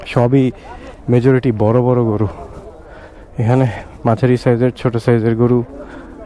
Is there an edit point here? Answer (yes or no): no